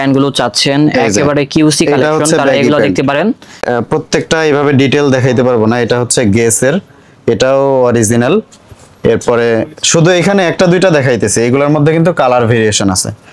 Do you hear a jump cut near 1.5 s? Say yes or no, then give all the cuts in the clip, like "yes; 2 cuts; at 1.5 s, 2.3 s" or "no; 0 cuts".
no; 1 cut; at 3.6 s